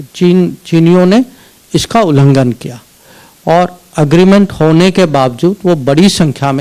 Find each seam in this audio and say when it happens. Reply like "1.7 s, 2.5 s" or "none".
none